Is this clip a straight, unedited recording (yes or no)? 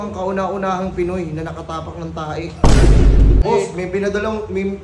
no